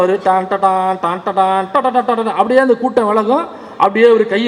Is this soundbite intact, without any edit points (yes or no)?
yes